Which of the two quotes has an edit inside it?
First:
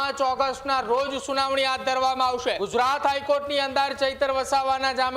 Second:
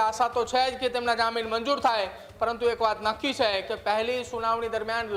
first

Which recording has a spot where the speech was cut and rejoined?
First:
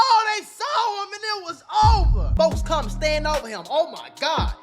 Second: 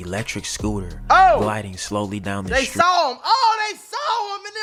first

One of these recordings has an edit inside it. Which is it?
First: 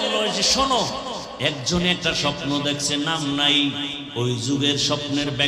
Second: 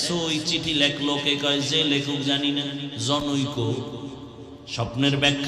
first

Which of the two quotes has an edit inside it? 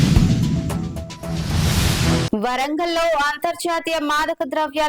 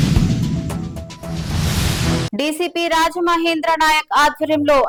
first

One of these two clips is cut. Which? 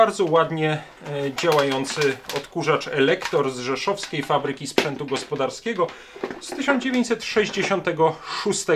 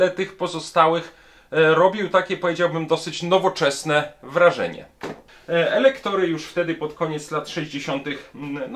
second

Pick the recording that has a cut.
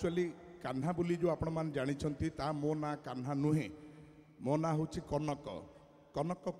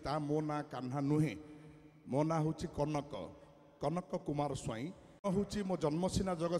second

